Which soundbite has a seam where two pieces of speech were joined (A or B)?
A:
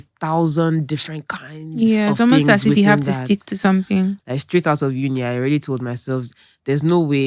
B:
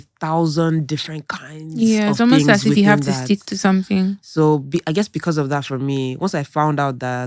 A